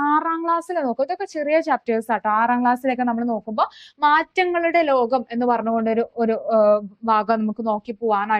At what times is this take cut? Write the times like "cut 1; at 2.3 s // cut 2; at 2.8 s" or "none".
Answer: none